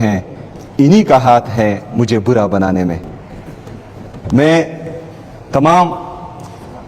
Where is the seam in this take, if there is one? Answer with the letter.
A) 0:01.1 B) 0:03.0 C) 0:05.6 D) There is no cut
D